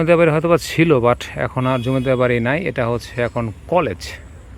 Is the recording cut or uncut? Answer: uncut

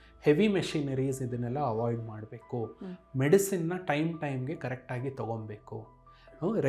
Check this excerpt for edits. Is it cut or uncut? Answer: uncut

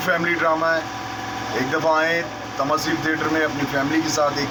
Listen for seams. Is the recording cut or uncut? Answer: uncut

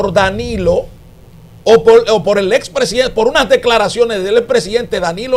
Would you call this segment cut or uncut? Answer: uncut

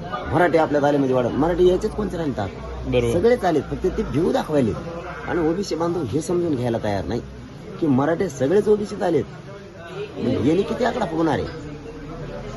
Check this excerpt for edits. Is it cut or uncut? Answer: uncut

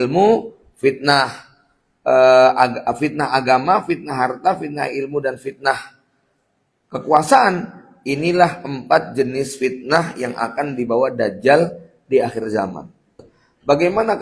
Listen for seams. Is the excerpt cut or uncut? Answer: cut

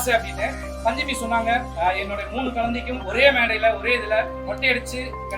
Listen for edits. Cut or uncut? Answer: cut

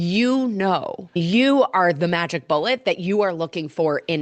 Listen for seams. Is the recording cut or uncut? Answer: cut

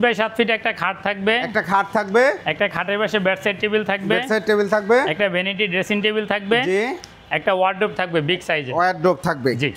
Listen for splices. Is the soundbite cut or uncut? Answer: uncut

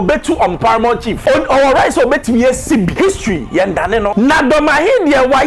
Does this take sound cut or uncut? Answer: cut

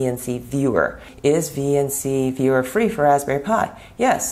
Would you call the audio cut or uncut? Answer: cut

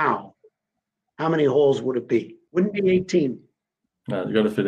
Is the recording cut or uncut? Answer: cut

